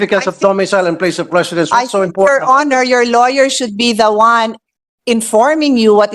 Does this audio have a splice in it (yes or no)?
no